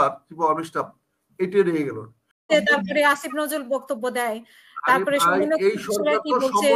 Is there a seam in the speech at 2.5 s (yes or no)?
yes